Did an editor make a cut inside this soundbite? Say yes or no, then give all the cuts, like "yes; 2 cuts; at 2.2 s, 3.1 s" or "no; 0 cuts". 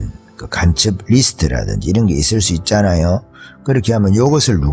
no; 0 cuts